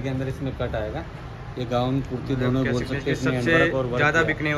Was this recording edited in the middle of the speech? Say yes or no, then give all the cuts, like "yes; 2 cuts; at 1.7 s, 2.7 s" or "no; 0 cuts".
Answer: no; 0 cuts